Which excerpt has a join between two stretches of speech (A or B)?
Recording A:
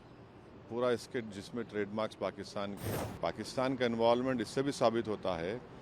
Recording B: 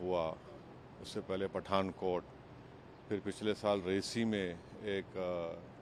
A